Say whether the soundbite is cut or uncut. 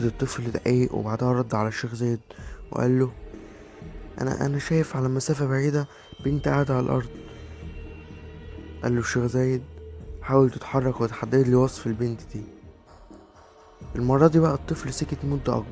uncut